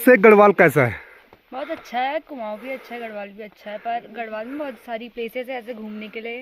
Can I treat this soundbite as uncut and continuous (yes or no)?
yes